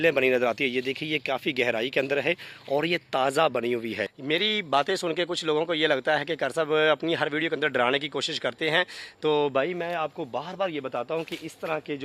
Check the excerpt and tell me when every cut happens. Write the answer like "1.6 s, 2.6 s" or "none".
4.1 s